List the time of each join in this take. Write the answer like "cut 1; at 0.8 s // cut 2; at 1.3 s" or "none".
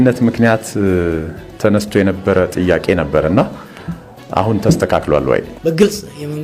cut 1; at 5.5 s

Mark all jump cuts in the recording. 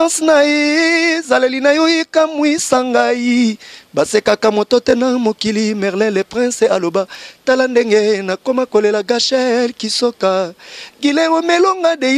none

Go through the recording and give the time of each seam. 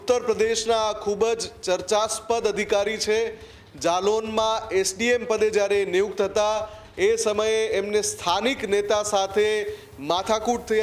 none

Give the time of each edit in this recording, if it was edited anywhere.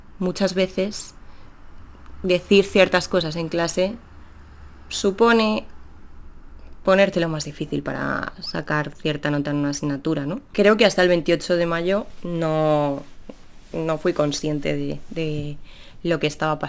cut 1; at 10.4 s

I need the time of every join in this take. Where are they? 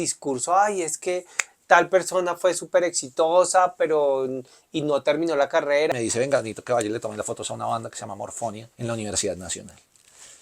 cut 1; at 5.9 s // cut 2; at 8.7 s

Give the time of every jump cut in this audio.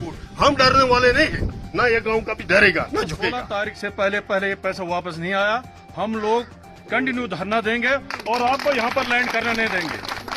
cut 1; at 3.4 s

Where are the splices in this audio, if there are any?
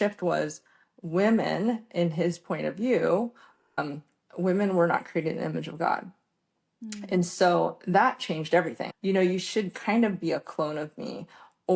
cut 1; at 8.8 s

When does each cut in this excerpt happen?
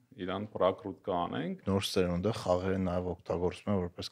cut 1; at 1.6 s

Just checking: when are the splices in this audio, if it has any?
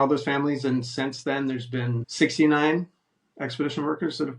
cut 1; at 2.0 s

